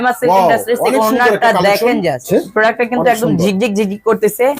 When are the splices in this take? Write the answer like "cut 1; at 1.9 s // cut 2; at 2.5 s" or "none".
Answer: cut 1; at 2.2 s